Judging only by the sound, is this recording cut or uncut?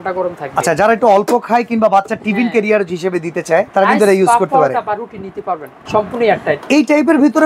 cut